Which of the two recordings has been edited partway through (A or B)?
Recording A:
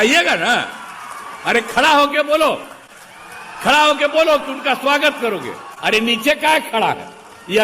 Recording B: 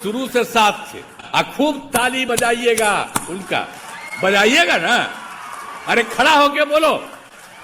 B